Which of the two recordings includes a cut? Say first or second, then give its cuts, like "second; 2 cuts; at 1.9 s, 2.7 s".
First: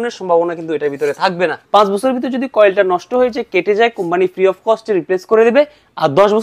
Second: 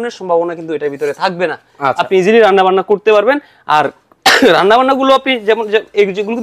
first; 1 cut; at 1.6 s